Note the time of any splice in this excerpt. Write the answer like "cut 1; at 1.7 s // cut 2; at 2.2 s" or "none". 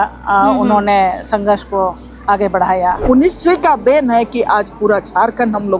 cut 1; at 3.0 s